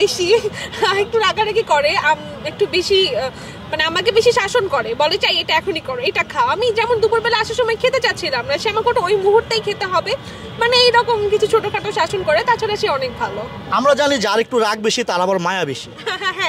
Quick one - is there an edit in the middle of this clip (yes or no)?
no